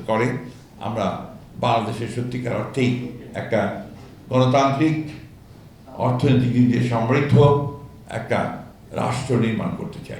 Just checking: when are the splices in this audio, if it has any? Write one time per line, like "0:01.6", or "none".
none